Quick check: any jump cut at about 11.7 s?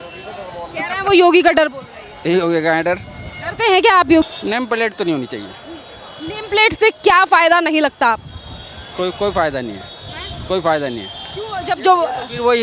no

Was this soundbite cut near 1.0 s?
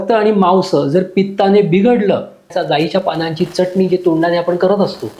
no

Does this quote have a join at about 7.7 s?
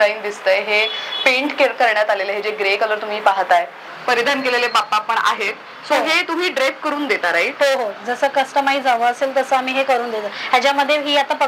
no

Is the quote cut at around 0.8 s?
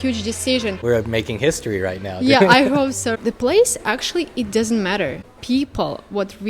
yes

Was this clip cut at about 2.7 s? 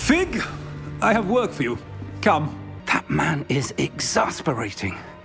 yes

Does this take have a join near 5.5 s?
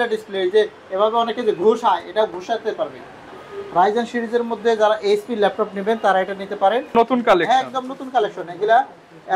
no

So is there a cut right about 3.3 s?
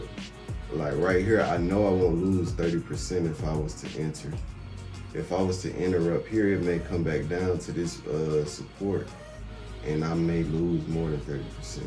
no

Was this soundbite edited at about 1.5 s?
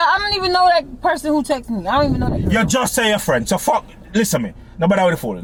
no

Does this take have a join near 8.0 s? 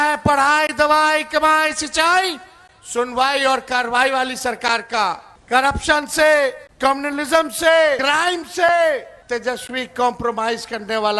yes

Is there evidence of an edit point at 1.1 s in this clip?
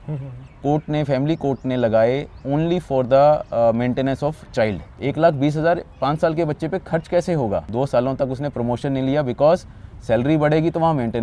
no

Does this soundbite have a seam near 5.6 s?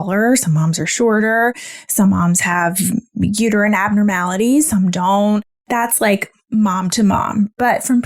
yes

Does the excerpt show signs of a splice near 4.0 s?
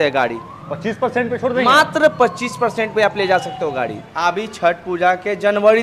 yes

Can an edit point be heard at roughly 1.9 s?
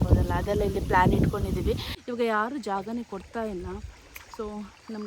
yes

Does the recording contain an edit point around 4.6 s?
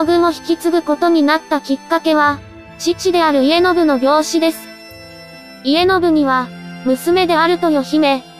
yes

